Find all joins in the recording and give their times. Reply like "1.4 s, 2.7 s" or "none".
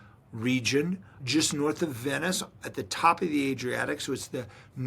1.1 s